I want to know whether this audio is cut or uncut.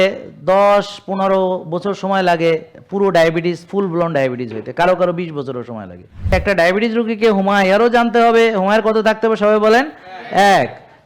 cut